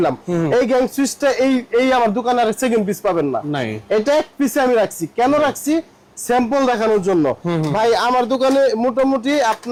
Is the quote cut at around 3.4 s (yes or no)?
no